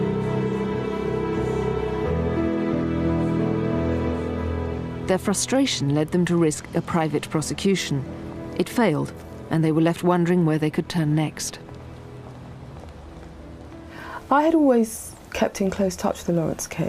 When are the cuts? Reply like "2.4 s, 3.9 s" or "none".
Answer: 5.4 s